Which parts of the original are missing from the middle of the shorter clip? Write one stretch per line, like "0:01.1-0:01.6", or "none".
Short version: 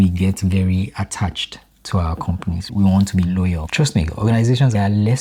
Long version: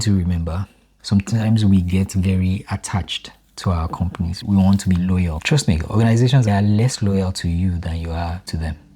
none